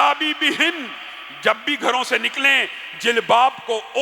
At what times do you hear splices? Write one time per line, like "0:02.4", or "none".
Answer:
none